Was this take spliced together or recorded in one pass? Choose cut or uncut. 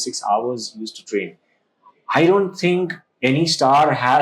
uncut